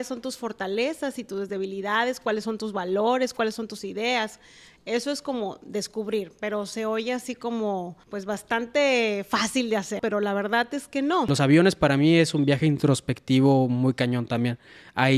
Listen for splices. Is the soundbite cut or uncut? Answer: cut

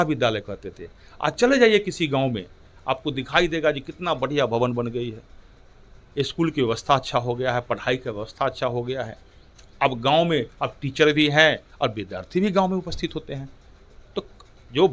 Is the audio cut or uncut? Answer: uncut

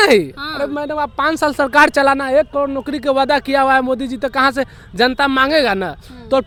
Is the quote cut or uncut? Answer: uncut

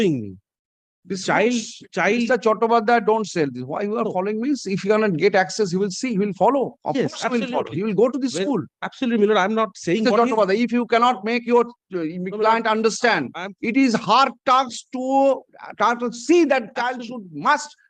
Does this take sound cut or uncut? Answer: uncut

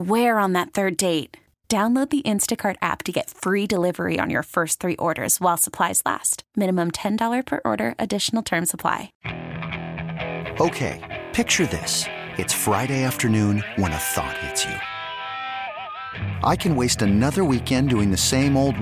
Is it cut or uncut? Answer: cut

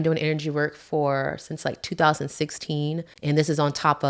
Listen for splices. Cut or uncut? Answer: cut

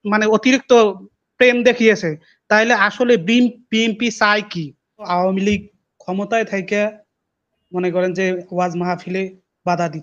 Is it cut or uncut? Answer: cut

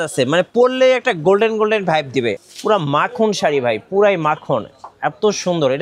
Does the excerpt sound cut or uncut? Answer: cut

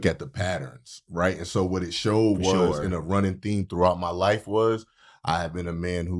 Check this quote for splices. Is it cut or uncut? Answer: uncut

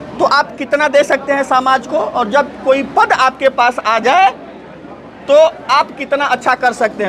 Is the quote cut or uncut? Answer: uncut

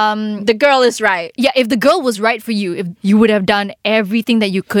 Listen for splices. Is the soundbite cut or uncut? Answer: cut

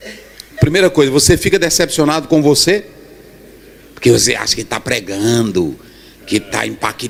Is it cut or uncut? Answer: uncut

